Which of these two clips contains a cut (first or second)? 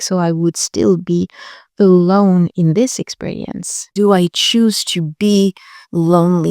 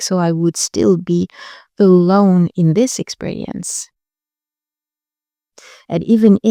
first